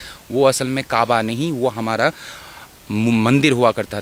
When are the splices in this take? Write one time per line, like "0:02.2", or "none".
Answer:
none